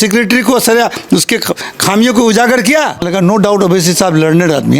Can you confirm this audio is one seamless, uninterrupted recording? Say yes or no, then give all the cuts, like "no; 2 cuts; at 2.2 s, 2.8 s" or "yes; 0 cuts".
no; 1 cut; at 3.0 s